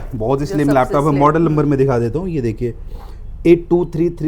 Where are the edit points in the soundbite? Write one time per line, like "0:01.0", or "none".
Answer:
none